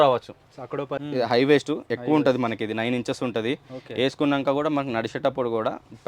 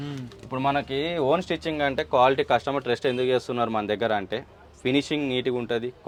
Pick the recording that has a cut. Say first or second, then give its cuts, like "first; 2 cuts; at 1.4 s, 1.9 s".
first; 1 cut; at 0.9 s